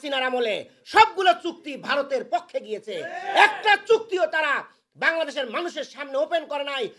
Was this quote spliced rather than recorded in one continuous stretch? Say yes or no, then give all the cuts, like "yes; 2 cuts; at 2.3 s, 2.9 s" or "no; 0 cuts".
no; 0 cuts